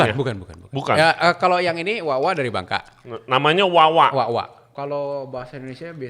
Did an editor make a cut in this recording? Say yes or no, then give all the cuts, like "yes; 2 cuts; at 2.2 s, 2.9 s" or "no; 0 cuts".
yes; 1 cut; at 4.7 s